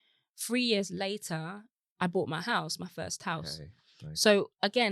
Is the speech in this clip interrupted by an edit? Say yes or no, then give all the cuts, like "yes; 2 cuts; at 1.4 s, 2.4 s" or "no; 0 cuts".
no; 0 cuts